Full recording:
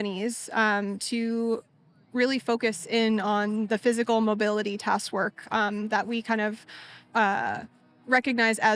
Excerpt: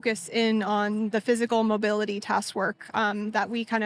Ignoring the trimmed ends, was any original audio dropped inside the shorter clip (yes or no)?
no